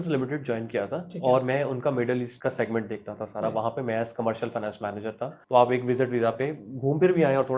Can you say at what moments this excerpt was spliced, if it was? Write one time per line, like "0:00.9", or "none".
0:02.3
0:05.3

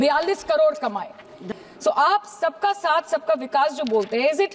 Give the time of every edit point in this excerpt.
0:01.4

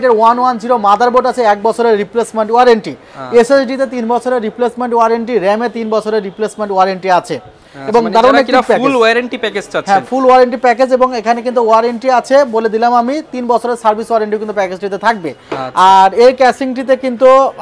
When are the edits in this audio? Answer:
none

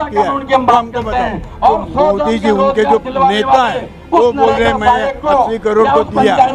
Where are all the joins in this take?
0:01.4

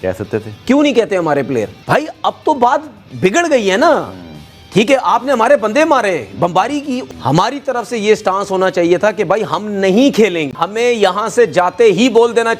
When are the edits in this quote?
0:01.8
0:10.5

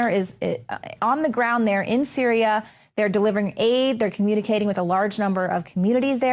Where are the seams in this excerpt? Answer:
none

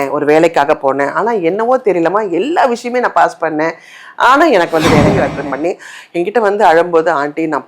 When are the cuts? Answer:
0:05.1

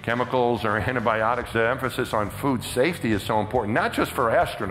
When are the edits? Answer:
0:01.5

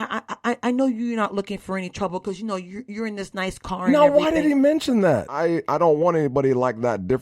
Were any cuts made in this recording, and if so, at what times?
0:05.3

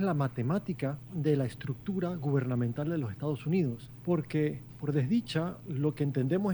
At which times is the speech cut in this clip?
0:01.0
0:03.9
0:04.7
0:05.6

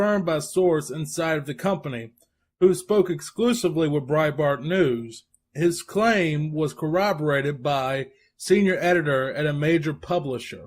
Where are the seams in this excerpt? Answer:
0:06.5

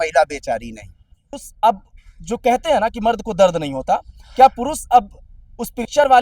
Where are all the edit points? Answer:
0:01.4

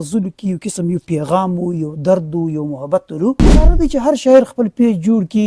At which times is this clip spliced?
0:03.7

